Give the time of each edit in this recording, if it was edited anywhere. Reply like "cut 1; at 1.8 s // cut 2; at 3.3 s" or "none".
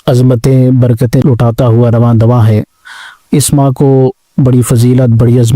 cut 1; at 1.2 s